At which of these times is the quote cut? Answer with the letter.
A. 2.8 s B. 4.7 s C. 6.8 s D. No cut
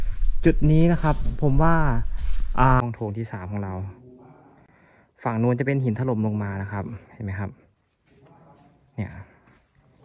A